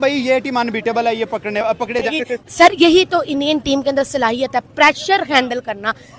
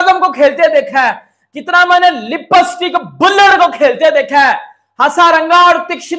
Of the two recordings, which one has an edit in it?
first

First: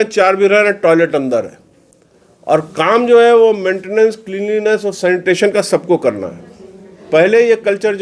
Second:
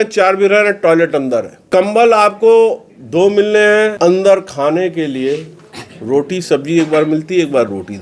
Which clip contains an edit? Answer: second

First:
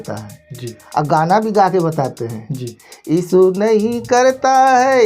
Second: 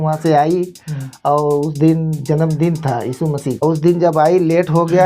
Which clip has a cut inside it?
second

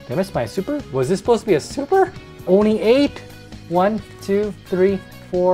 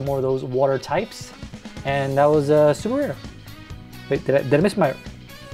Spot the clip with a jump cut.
first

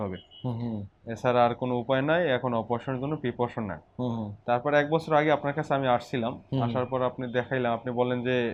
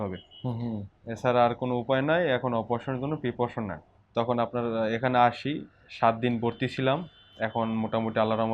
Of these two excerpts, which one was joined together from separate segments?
second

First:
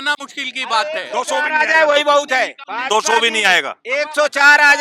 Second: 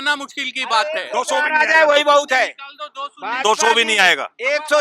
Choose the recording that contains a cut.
first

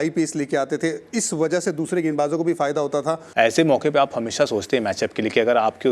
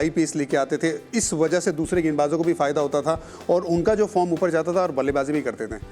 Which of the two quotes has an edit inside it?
first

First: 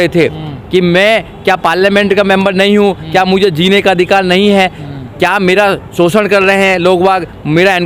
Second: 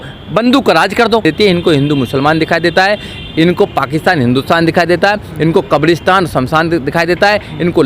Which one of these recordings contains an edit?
second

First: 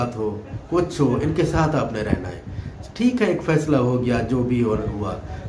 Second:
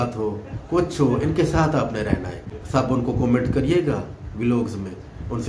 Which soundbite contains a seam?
second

